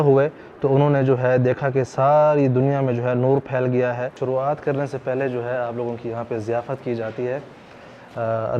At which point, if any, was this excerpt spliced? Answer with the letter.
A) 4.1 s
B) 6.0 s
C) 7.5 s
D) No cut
A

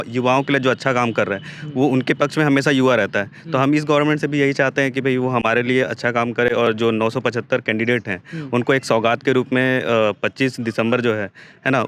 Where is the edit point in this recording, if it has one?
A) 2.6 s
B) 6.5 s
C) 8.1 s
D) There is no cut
D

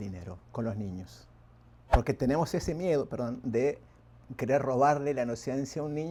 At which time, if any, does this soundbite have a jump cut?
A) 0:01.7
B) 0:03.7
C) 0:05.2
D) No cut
D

